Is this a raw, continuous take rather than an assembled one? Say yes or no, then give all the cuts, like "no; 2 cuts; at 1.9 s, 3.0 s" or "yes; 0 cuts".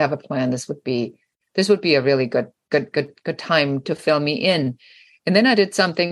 yes; 0 cuts